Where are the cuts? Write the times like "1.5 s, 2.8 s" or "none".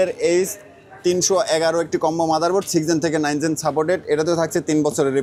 none